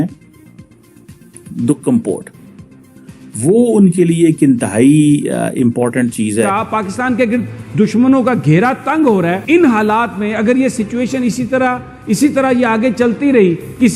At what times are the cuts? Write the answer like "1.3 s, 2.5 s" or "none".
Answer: 6.5 s, 9.4 s